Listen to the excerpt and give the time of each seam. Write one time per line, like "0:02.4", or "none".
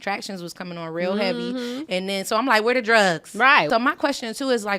0:03.7